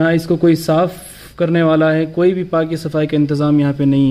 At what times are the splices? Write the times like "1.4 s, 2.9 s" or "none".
none